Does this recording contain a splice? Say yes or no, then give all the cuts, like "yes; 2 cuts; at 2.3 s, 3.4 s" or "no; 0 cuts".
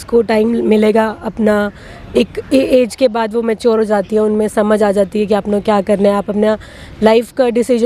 no; 0 cuts